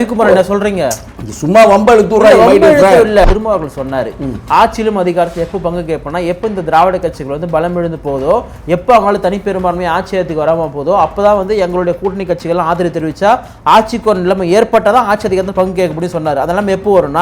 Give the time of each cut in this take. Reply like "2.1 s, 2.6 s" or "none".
3.2 s